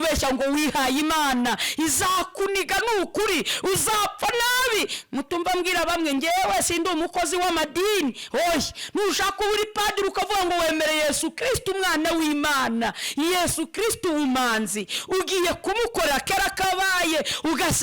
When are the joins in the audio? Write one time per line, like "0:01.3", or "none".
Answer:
none